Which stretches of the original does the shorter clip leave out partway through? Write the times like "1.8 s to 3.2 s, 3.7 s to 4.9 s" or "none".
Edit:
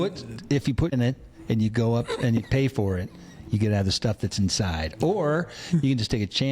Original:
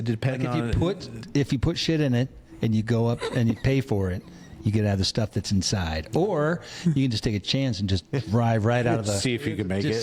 1.8 s to 2.1 s

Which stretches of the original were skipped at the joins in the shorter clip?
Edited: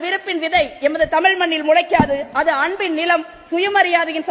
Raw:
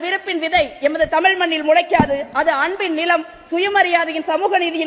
none

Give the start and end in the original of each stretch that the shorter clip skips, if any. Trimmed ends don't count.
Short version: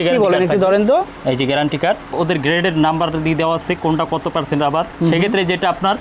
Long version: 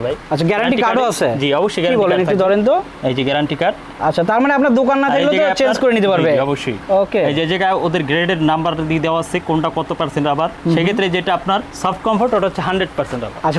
3.9 s to 7.8 s

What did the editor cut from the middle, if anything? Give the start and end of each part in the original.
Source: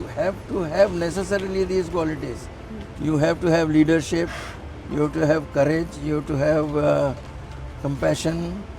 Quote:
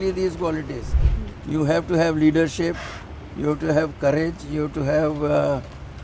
none

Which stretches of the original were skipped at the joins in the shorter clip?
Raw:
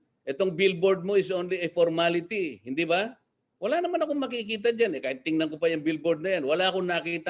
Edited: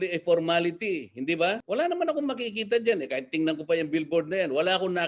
3.1 s to 3.5 s

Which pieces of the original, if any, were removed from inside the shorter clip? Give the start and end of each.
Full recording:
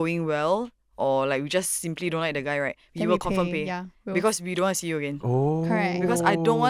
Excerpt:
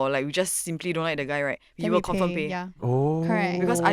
3.9 s to 5.2 s

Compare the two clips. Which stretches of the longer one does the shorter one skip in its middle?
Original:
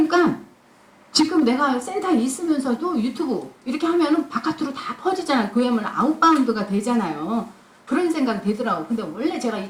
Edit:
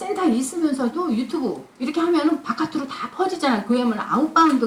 none

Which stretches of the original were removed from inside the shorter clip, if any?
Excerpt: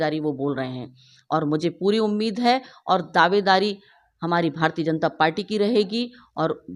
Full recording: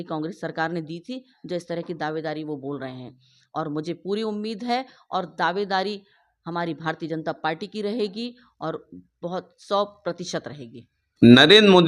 none

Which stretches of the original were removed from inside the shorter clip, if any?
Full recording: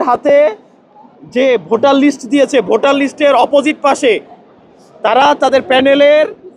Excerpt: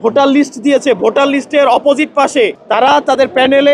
4.3 s to 4.9 s

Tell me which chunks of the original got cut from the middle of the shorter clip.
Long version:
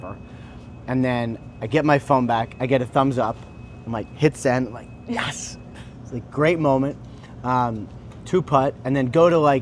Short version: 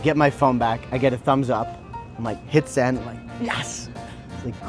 none

